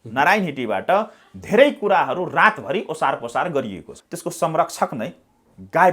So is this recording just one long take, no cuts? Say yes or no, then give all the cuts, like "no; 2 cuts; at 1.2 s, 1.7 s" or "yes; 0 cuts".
no; 1 cut; at 4.0 s